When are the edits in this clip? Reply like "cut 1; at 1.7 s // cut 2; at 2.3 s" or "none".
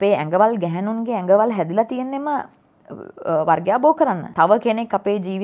cut 1; at 4.3 s